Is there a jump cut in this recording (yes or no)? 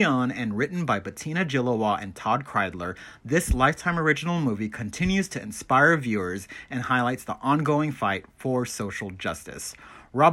no